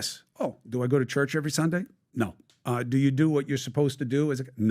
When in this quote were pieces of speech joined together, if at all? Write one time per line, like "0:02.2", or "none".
0:02.8